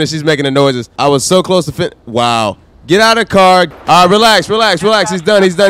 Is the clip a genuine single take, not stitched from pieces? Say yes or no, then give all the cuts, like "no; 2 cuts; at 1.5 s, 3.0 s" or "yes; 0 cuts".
no; 2 cuts; at 0.9 s, 3.7 s